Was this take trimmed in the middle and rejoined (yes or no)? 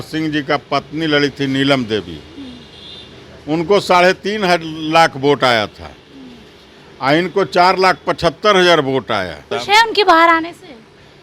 yes